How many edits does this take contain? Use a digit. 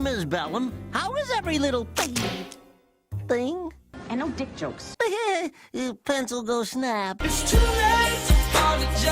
2